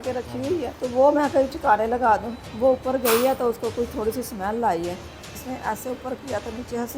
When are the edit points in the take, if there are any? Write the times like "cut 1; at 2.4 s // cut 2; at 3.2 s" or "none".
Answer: cut 1; at 2.4 s // cut 2; at 5.4 s